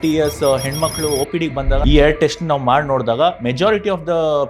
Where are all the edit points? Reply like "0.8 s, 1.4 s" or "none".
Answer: 1.8 s